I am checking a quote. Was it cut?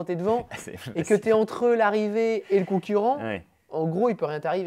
no; 0 cuts

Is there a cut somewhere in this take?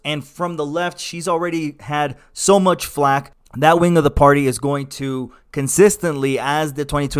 yes; 1 cut; at 3.4 s

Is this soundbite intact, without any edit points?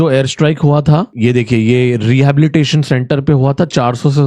yes; 0 cuts

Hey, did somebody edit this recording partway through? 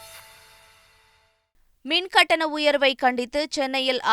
no; 0 cuts

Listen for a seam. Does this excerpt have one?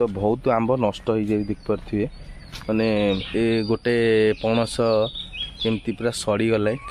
yes; 1 cut; at 3.2 s

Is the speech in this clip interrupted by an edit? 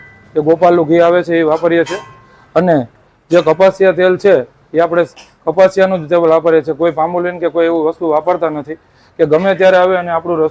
no; 0 cuts

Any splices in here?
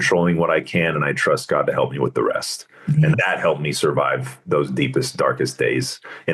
yes; 1 cut; at 3.2 s

